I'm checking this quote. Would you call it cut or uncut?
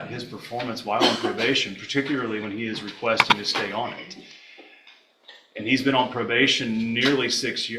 uncut